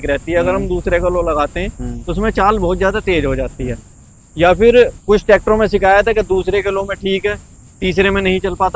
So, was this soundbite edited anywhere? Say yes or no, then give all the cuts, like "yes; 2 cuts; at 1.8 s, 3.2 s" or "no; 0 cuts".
no; 0 cuts